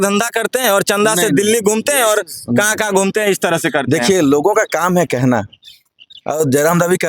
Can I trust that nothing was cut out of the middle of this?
yes; 0 cuts

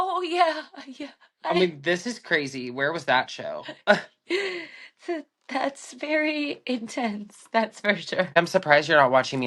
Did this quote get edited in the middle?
yes; 1 cut; at 8.3 s

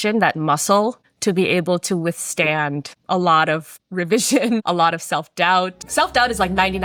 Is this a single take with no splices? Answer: yes; 0 cuts

